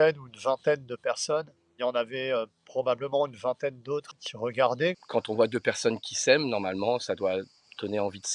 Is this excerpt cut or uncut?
cut